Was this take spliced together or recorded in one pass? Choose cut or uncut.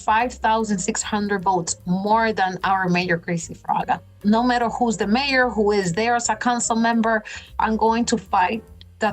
cut